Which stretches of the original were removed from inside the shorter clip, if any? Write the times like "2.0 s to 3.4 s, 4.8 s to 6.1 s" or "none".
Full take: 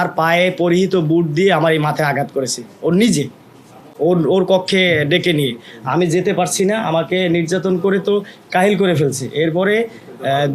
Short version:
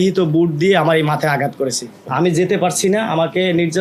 2.7 s to 5.7 s